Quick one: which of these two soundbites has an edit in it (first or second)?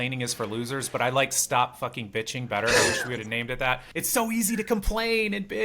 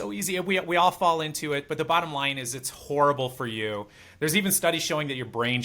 first